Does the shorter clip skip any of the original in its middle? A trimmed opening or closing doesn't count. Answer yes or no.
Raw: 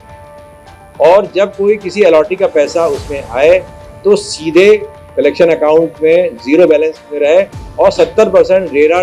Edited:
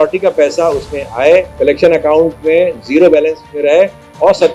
yes